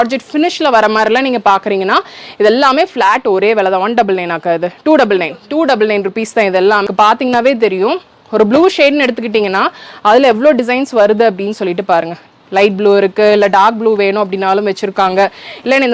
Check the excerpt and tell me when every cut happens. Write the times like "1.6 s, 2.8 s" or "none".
6.9 s